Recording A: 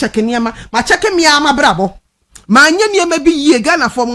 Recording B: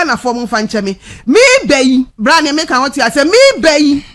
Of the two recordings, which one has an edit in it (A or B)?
B